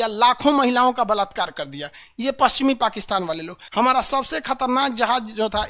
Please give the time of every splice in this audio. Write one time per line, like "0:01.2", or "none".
0:03.6